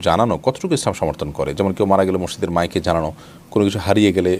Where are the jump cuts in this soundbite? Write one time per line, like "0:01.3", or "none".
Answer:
none